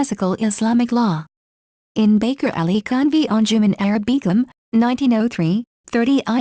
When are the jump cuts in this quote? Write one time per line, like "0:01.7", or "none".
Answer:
0:00.9